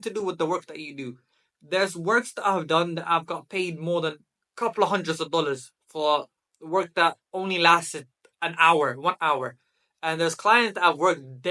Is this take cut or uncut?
uncut